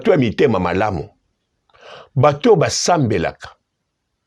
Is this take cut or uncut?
uncut